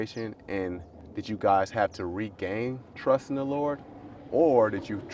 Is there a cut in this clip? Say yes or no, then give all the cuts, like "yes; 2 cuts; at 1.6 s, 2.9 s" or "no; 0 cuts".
yes; 1 cut; at 0.9 s